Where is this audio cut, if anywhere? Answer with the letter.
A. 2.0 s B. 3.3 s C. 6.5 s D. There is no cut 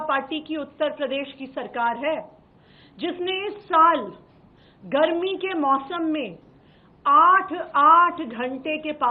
D